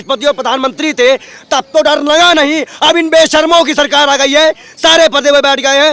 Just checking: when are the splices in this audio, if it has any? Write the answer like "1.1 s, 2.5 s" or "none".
none